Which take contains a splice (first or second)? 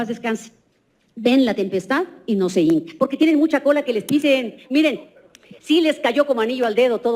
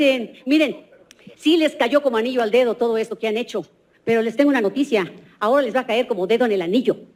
first